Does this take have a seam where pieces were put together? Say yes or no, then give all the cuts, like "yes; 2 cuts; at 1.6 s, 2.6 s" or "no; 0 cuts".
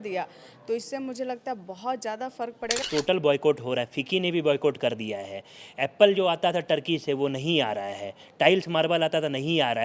yes; 1 cut; at 2.8 s